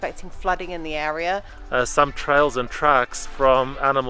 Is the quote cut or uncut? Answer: cut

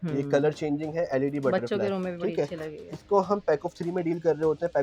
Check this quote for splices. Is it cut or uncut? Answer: uncut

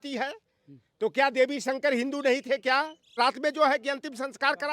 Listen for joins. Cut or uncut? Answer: cut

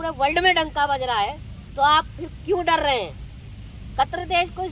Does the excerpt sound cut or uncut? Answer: uncut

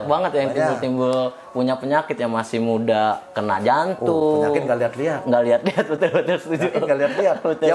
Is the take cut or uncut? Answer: uncut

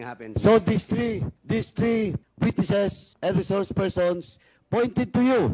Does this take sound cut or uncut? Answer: cut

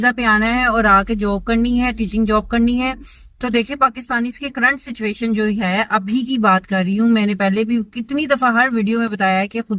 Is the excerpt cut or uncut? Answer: uncut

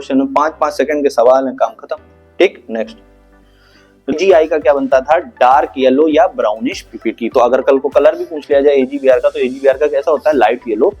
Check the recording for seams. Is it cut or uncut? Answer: cut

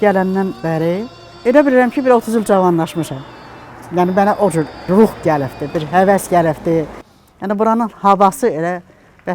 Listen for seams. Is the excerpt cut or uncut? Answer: cut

